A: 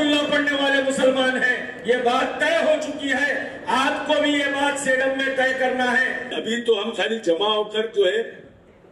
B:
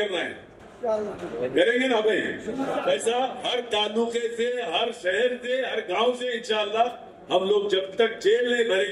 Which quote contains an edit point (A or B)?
A